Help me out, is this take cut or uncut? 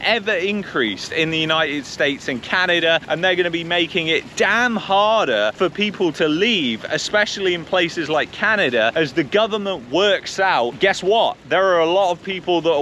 uncut